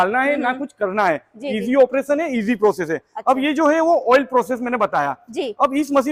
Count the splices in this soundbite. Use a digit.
0